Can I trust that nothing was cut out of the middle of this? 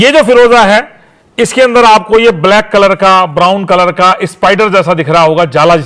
yes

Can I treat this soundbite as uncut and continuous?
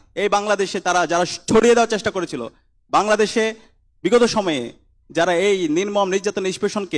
yes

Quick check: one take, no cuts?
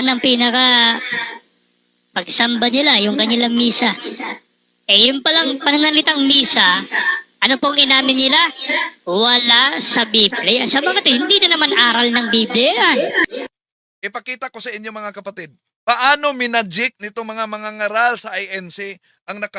no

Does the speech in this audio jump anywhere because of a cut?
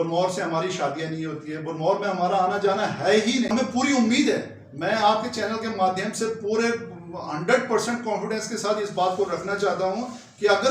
yes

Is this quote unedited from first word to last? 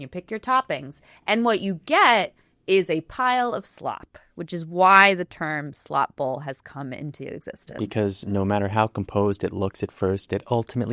yes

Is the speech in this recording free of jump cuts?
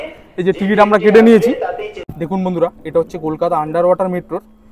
no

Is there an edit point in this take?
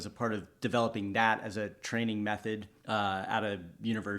yes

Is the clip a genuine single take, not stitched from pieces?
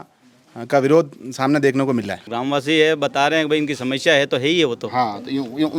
no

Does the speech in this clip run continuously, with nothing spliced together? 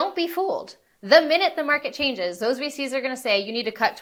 yes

